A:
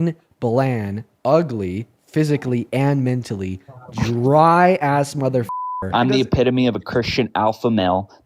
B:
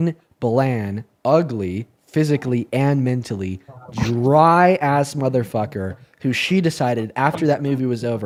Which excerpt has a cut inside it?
A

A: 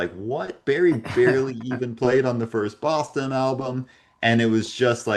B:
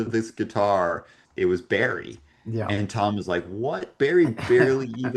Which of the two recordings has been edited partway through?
B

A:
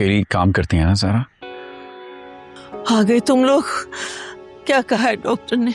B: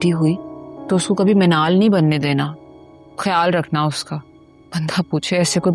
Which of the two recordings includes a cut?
A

